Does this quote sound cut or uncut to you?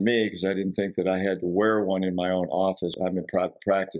cut